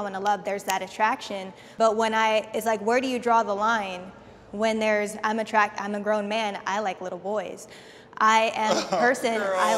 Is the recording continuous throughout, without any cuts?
yes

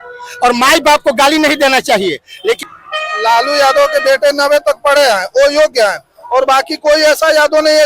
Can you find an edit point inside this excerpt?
yes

